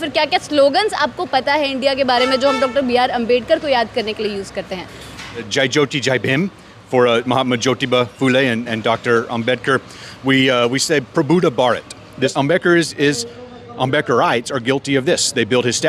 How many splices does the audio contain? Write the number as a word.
two